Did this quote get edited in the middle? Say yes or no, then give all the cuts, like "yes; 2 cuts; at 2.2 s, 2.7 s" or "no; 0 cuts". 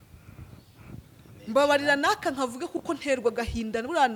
no; 0 cuts